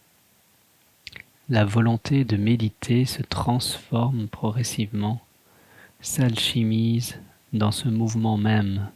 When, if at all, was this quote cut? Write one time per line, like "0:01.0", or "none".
0:01.0
0:02.3